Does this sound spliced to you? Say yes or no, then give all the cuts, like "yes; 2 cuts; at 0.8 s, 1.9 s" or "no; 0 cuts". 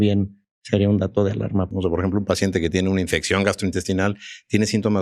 yes; 1 cut; at 1.7 s